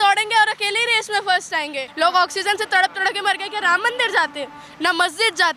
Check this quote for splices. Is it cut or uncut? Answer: cut